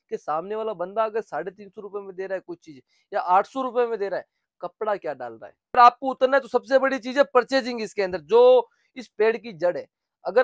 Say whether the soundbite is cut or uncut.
cut